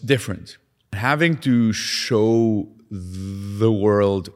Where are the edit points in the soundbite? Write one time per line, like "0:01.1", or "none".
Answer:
0:01.0